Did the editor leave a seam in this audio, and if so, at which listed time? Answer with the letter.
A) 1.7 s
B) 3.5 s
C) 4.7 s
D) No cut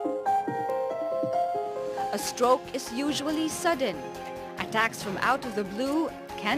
A